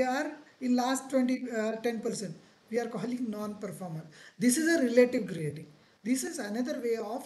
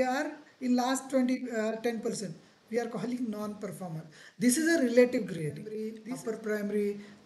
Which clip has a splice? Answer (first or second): second